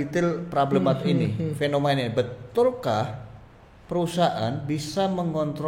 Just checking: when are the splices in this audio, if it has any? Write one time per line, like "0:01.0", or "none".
none